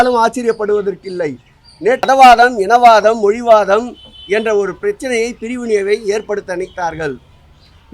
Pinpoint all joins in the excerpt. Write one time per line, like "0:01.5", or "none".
0:02.0